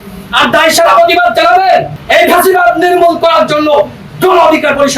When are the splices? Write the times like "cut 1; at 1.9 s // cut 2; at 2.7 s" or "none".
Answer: cut 1; at 2.0 s